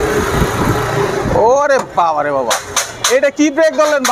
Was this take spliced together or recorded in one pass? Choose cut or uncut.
uncut